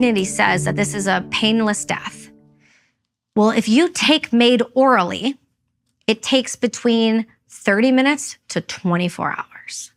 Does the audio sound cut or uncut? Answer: uncut